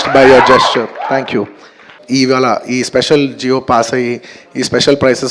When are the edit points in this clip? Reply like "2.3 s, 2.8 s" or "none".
1.9 s